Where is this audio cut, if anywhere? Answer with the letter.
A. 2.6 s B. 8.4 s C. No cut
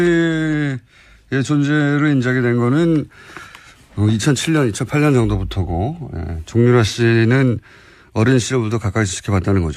A